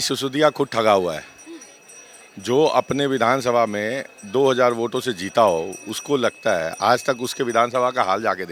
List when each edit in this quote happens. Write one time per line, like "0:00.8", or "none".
none